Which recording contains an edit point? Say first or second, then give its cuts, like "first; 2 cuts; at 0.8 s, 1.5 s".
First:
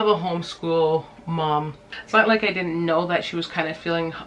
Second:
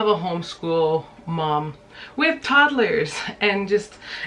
first; 1 cut; at 1.9 s